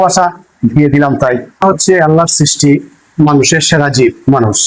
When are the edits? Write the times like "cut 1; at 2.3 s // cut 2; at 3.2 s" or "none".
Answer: cut 1; at 1.5 s